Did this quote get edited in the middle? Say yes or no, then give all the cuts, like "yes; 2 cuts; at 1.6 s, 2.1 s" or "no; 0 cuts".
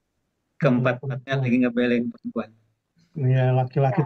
no; 0 cuts